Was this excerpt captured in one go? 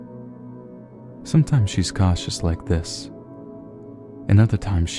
no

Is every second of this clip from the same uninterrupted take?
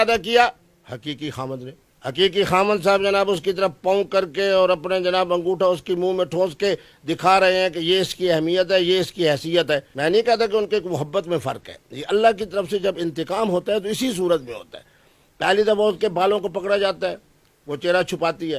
yes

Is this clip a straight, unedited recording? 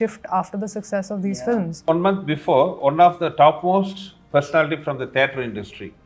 no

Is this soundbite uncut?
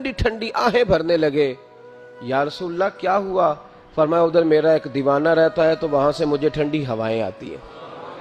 yes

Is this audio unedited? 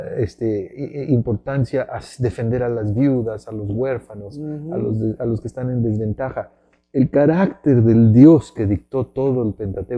yes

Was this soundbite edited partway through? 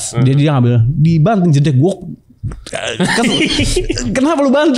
no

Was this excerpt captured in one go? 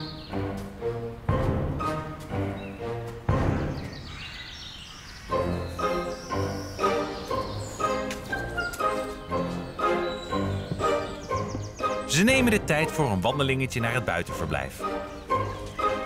yes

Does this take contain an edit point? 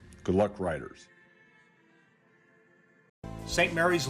yes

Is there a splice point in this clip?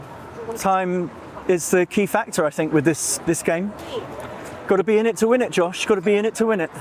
no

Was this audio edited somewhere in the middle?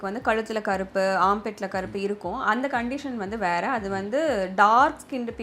no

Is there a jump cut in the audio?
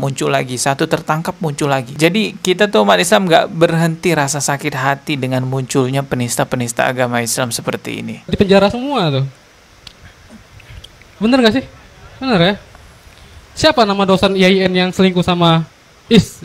no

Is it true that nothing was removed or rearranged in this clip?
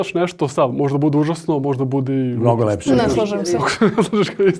yes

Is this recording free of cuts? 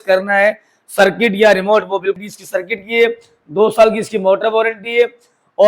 no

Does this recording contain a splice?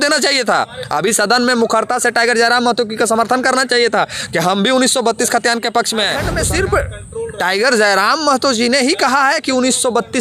yes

